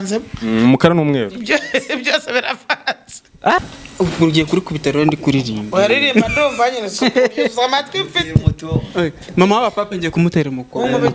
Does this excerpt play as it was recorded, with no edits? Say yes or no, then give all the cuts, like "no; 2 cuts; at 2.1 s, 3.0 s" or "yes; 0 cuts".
no; 1 cut; at 3.6 s